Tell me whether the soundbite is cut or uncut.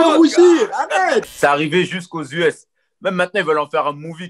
cut